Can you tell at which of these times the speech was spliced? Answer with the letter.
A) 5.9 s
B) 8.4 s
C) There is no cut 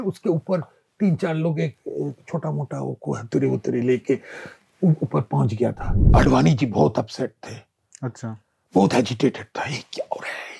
A